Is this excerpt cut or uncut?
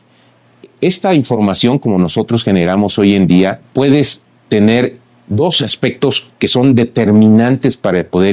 cut